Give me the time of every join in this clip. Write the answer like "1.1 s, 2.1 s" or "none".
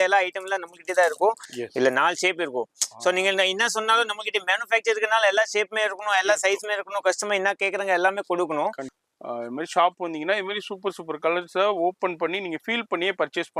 1.5 s, 8.9 s